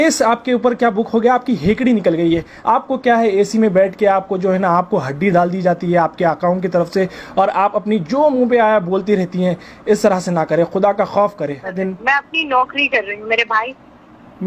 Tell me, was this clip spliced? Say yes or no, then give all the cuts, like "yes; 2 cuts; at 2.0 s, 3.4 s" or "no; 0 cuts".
yes; 2 cuts; at 2.5 s, 11.7 s